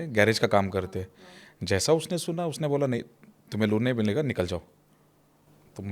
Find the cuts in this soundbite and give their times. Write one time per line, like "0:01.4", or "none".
none